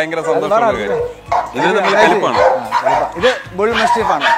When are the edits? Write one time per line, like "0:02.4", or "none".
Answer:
0:01.2
0:03.1